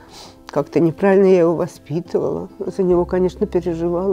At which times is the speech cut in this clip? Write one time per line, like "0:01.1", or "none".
0:02.5